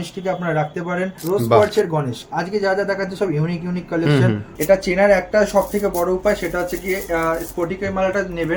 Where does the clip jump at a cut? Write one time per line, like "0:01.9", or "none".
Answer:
0:01.1
0:04.5